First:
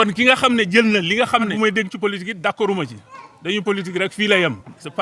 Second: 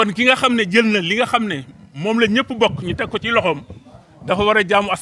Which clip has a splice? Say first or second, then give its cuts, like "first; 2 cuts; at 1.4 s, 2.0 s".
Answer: first; 1 cut; at 1.5 s